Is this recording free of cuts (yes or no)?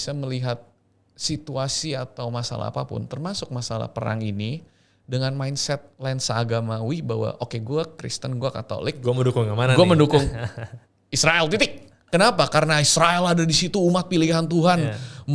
yes